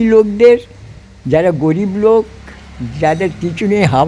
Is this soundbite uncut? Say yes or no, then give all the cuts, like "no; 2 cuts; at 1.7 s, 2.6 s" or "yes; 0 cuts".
yes; 0 cuts